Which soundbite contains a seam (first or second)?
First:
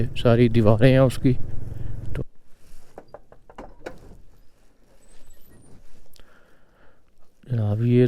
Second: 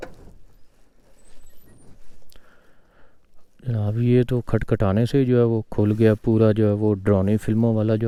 first